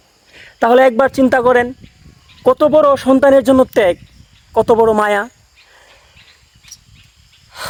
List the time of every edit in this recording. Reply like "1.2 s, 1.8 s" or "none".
none